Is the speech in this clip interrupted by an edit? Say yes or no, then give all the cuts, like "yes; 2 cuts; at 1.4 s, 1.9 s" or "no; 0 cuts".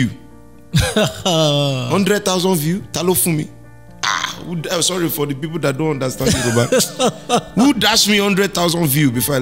no; 0 cuts